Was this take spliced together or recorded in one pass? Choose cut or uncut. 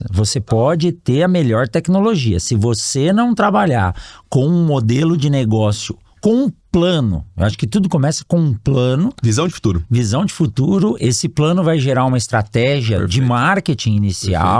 uncut